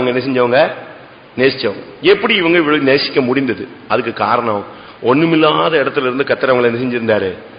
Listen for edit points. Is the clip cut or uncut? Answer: uncut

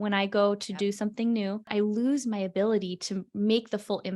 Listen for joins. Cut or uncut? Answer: cut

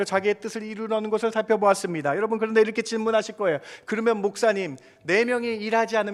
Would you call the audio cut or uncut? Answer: uncut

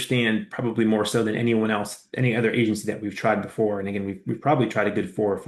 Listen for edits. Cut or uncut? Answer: uncut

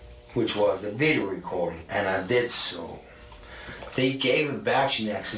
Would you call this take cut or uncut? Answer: uncut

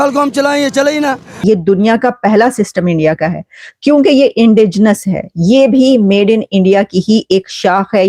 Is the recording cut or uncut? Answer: cut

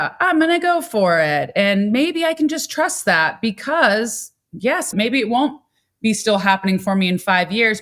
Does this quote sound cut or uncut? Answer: cut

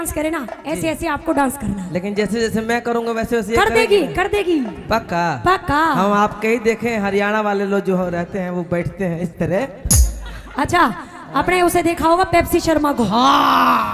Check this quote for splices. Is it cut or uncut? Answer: uncut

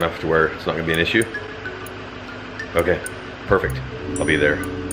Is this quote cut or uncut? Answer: uncut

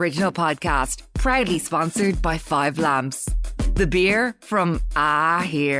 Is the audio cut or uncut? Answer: uncut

